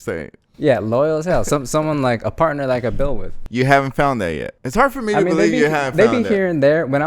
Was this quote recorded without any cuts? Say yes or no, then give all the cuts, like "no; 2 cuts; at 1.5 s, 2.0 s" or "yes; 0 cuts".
no; 1 cut; at 3.4 s